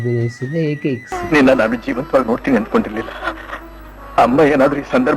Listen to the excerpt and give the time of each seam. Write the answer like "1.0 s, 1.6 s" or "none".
1.1 s